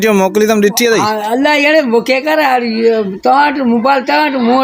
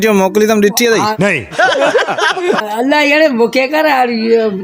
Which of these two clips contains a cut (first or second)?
first